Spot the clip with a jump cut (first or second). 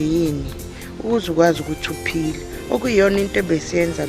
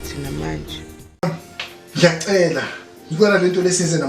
second